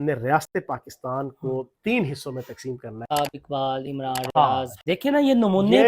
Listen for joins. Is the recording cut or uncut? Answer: cut